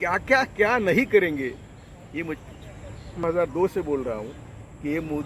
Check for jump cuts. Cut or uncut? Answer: cut